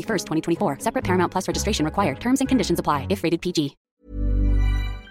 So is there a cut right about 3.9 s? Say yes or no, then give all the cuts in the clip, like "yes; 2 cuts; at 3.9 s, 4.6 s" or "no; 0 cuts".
yes; 1 cut; at 3.9 s